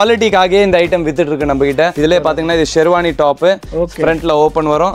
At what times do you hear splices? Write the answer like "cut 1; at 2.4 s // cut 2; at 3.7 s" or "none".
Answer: none